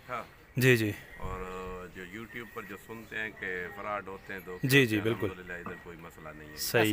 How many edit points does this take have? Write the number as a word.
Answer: zero